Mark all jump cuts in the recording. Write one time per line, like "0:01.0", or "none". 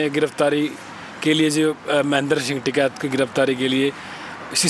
none